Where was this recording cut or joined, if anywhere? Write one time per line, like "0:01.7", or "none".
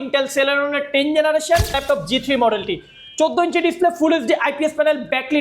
0:01.8